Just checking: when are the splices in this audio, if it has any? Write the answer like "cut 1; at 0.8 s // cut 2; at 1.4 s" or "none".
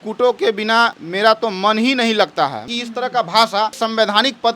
cut 1; at 1.0 s // cut 2; at 2.6 s // cut 3; at 3.8 s